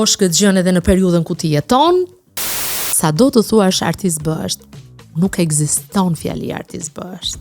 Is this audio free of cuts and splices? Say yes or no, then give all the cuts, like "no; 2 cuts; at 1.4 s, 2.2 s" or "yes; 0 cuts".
no; 1 cut; at 2.5 s